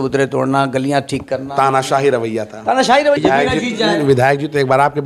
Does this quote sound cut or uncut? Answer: cut